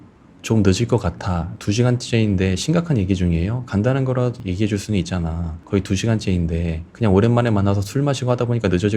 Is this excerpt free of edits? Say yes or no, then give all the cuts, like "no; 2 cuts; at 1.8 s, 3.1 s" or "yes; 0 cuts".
no; 1 cut; at 1.5 s